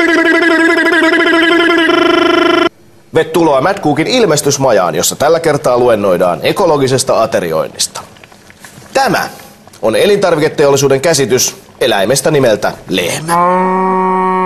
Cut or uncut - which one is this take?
cut